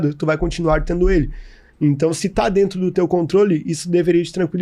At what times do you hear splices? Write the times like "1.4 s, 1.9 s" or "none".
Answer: none